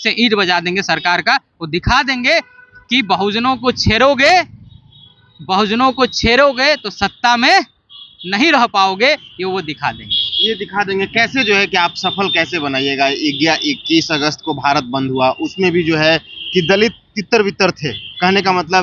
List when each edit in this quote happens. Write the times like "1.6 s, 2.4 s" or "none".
none